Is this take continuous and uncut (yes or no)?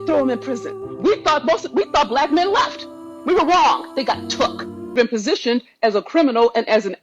no